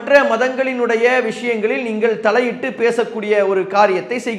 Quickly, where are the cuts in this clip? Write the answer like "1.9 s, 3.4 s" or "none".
none

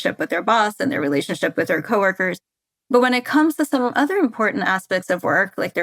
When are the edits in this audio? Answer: none

